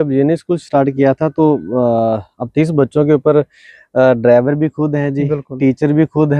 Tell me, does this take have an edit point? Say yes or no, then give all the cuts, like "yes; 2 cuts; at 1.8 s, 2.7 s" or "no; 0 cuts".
no; 0 cuts